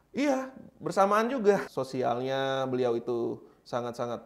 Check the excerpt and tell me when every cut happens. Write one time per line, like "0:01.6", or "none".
0:01.7